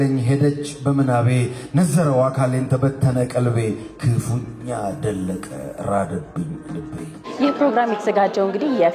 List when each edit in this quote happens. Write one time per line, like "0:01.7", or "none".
0:07.3

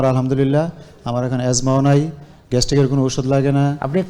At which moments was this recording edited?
none

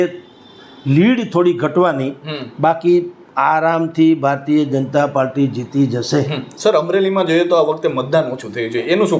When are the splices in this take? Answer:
none

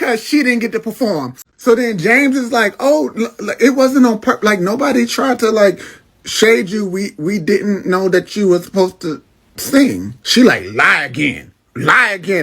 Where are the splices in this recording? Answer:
0:01.3

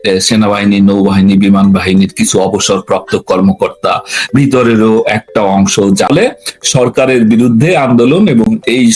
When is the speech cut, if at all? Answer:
0:06.1

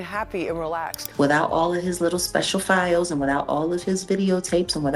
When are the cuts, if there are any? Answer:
0:01.0

